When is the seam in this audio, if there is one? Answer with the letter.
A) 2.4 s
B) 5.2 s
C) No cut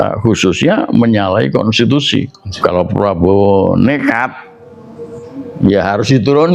A